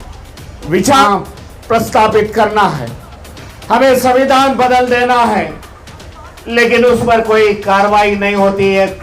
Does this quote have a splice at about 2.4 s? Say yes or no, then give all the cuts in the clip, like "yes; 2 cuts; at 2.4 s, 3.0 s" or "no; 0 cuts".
no; 1 cut; at 1.0 s